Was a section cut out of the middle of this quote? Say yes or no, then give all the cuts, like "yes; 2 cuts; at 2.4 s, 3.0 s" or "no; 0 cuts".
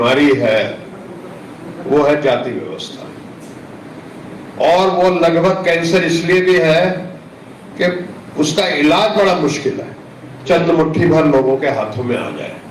yes; 1 cut; at 10.4 s